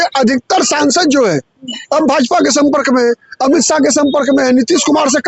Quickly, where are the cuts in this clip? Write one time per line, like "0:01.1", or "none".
none